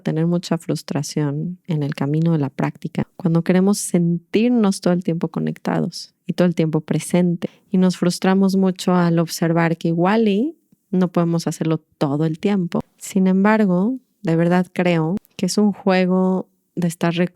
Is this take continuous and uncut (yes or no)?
no